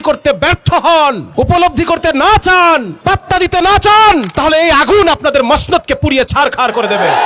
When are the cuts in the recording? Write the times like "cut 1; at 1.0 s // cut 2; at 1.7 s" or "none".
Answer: cut 1; at 1.2 s // cut 2; at 2.9 s // cut 3; at 4.3 s